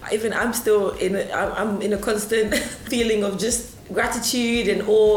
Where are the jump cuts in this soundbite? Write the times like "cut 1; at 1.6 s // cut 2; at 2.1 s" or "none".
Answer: cut 1; at 2.8 s